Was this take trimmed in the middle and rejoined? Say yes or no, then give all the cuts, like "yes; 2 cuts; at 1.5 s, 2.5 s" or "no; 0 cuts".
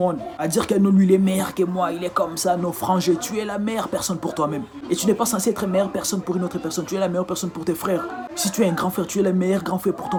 no; 0 cuts